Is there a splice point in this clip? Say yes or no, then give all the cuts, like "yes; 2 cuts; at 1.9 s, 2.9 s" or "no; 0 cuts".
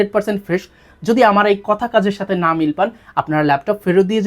no; 0 cuts